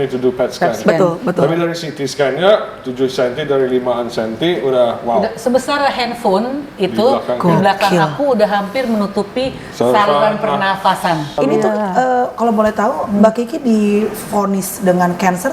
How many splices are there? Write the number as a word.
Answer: one